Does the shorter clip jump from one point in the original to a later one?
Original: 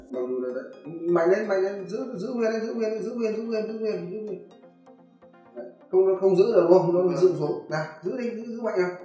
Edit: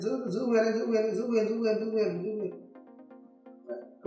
no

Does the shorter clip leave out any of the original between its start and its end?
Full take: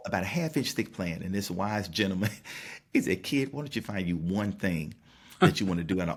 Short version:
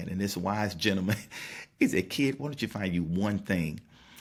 no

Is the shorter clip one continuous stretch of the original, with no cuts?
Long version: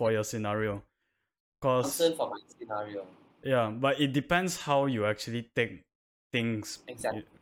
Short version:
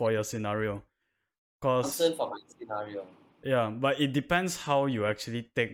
yes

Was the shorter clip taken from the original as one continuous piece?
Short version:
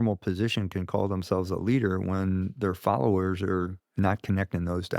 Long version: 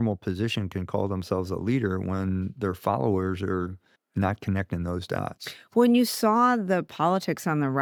no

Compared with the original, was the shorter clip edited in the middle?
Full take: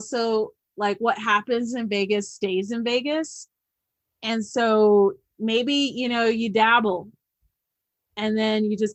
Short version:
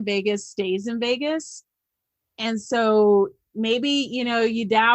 no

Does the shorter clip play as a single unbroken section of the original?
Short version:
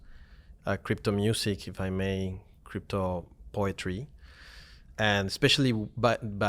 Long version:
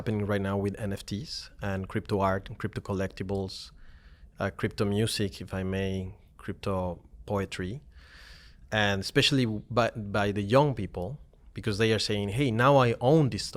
yes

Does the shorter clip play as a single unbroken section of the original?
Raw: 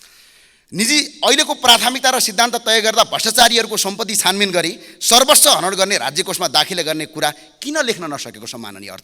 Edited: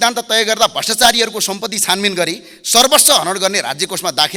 yes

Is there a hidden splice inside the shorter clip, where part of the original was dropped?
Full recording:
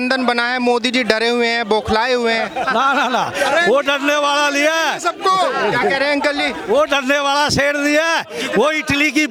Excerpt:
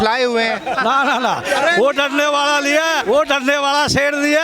yes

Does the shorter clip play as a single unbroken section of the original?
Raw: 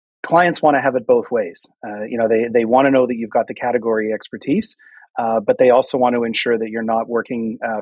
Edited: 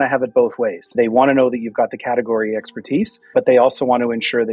no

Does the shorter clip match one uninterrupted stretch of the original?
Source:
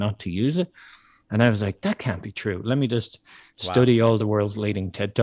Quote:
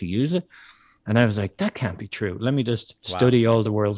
no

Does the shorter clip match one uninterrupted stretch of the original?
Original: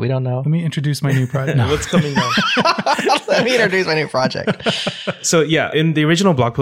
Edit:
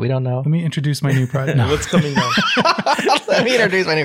yes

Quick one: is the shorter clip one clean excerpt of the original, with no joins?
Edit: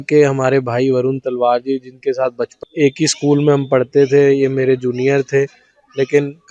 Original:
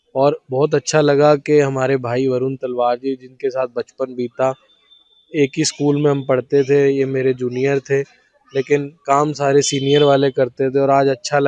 no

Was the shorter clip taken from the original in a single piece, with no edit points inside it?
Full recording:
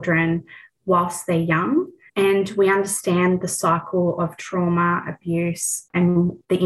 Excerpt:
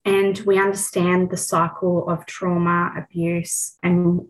yes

